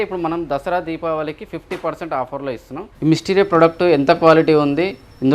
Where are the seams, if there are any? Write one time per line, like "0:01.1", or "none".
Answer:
none